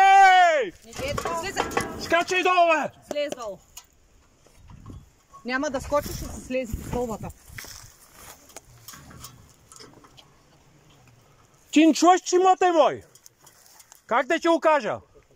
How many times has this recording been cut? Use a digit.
0